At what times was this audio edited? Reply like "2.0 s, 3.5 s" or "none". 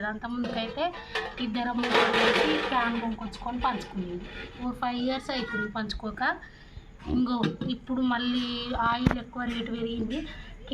4.4 s